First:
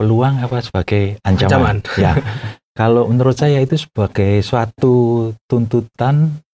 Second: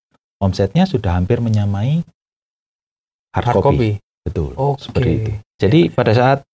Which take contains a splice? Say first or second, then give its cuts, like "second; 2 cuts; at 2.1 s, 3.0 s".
second; 1 cut; at 5.5 s